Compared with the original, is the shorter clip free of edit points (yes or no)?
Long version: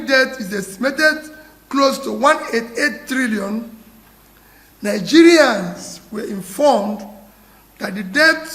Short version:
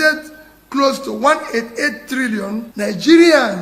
no